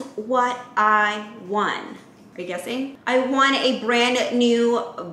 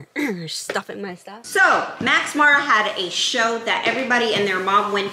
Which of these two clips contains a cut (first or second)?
second